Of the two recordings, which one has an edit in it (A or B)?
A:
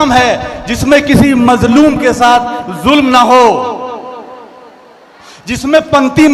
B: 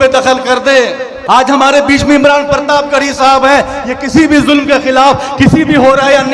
B